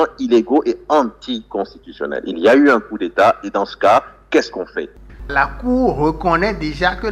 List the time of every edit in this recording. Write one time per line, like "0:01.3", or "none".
0:05.2

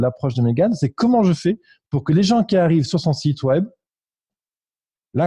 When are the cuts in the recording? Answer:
none

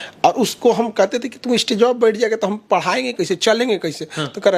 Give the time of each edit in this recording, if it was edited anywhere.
none

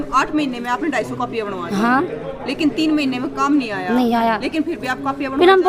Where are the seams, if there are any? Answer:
none

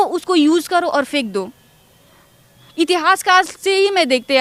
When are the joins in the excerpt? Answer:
none

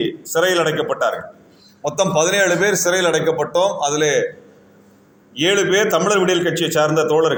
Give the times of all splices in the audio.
none

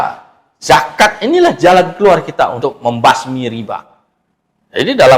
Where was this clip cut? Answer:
0:02.6

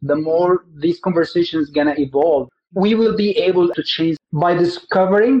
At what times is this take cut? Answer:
0:02.5
0:03.7

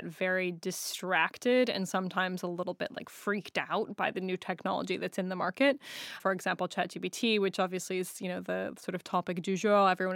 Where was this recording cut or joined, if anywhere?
0:06.2

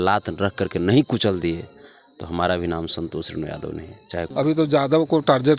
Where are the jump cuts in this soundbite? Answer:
0:04.3

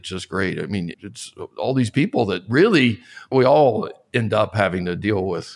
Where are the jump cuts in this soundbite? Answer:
0:00.9
0:03.3

